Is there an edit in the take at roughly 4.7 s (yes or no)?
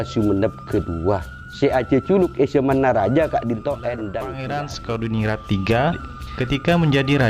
yes